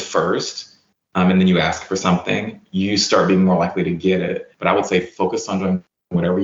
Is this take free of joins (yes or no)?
no